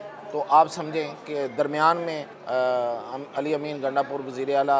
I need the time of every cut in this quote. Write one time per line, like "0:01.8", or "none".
0:02.3